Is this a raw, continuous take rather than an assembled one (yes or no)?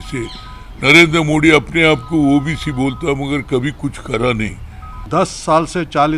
no